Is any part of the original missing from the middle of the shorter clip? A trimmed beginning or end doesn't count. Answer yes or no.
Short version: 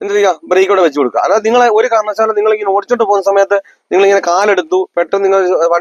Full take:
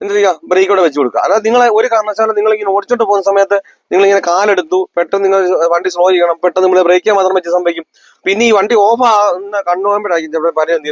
no